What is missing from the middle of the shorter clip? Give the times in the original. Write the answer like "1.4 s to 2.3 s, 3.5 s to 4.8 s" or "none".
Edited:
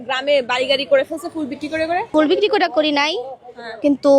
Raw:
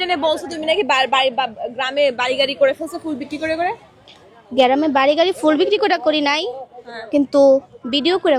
3.8 s to 5.4 s